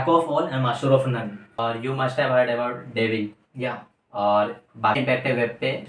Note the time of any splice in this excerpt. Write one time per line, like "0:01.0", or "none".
0:01.6
0:05.0